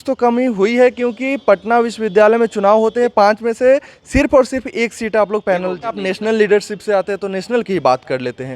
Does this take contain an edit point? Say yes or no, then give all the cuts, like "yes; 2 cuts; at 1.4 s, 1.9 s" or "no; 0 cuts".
yes; 1 cut; at 6.0 s